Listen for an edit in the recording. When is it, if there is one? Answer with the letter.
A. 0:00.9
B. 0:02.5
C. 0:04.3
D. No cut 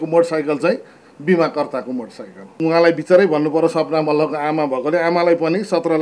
B